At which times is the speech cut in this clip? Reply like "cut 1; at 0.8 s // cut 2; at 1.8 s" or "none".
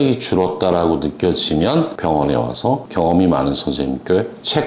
cut 1; at 1.9 s